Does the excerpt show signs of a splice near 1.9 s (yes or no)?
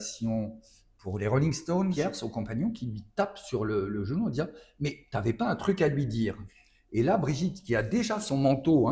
yes